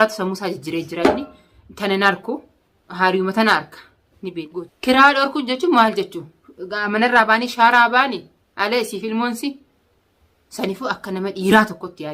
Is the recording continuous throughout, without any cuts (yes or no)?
no